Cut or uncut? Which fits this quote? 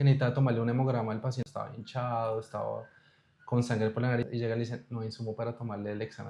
cut